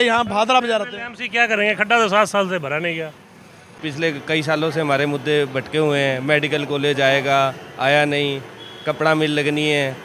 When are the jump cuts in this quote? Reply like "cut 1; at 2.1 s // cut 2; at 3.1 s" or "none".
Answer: cut 1; at 3.7 s